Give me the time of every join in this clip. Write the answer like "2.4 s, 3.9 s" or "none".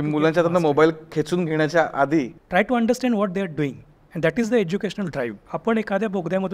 2.4 s, 5.5 s